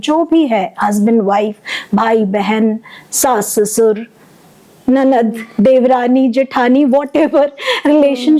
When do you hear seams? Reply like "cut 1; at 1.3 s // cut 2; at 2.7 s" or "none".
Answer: none

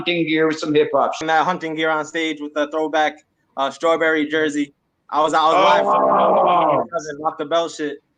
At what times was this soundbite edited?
cut 1; at 1.2 s

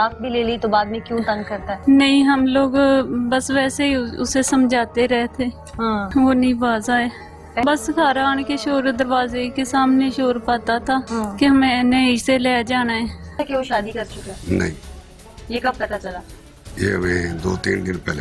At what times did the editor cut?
cut 1; at 1.7 s // cut 2; at 6.1 s // cut 3; at 7.6 s // cut 4; at 11.1 s // cut 5; at 13.4 s

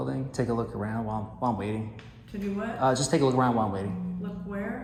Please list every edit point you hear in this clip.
none

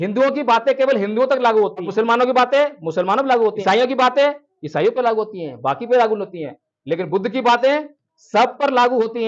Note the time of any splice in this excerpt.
cut 1; at 1.9 s // cut 2; at 3.6 s

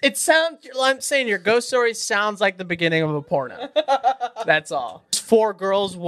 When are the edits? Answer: cut 1; at 5.1 s

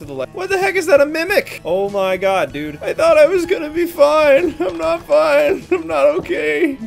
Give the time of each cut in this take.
none

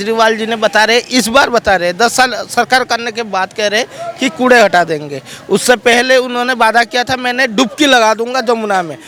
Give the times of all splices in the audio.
none

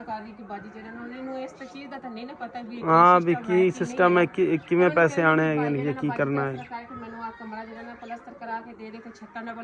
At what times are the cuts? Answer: none

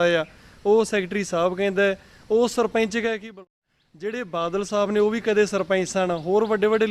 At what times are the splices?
cut 1; at 3.4 s

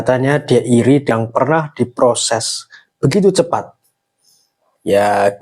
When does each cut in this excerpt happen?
cut 1; at 1.1 s

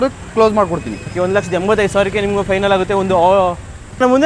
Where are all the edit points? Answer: none

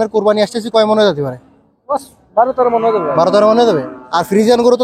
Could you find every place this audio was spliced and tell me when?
none

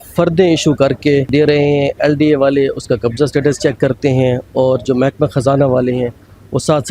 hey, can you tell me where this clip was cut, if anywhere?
cut 1; at 1.3 s

